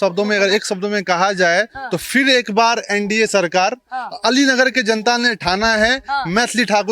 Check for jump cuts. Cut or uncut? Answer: uncut